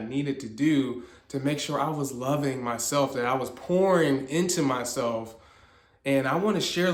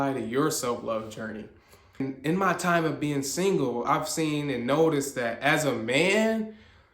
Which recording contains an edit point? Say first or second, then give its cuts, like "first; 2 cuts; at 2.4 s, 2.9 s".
second; 1 cut; at 2.0 s